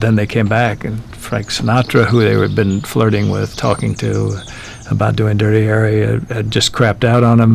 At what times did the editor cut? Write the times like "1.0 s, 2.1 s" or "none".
none